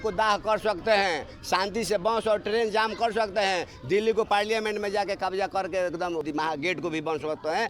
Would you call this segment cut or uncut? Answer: cut